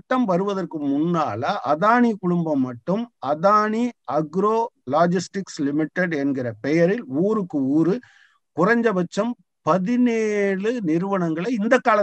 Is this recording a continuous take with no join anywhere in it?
yes; 0 cuts

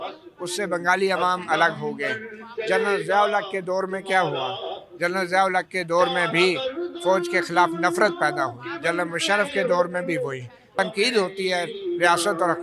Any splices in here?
yes; 1 cut; at 10.7 s

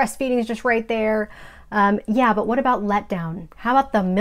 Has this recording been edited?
no; 0 cuts

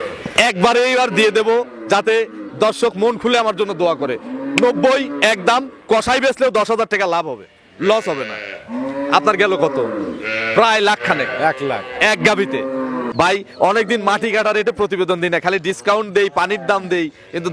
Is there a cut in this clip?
yes; 1 cut; at 13.1 s

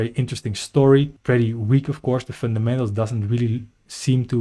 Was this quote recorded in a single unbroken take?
no; 1 cut; at 1.1 s

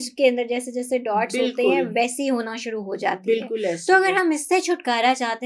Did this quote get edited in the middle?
no; 0 cuts

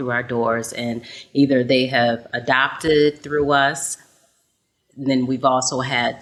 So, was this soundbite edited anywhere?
no; 0 cuts

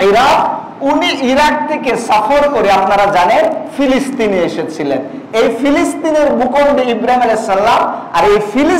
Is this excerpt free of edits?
yes; 0 cuts

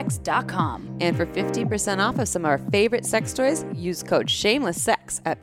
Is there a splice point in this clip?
no; 0 cuts

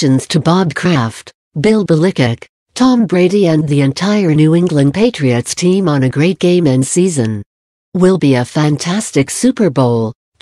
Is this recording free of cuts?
yes; 0 cuts

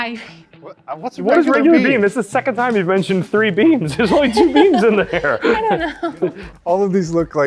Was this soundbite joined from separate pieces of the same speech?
yes; 1 cut; at 6.4 s

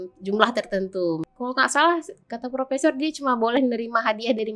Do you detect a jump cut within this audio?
yes; 1 cut; at 1.3 s

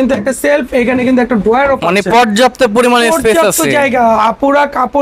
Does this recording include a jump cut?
no; 0 cuts

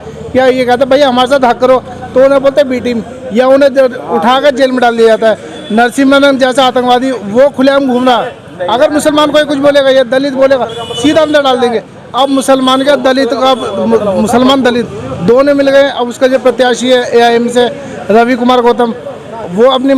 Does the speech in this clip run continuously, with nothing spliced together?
yes; 0 cuts

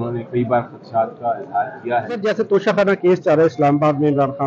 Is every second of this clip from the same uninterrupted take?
no; 1 cut; at 2.2 s

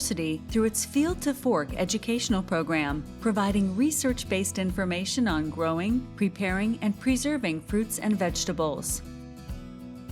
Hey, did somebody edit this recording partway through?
yes; 1 cut; at 8.9 s

